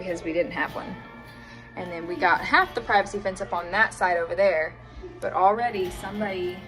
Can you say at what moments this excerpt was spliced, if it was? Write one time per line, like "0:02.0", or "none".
0:02.4